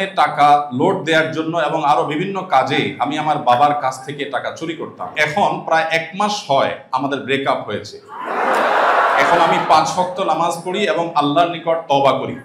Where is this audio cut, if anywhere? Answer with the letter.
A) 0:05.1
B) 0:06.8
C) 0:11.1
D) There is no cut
A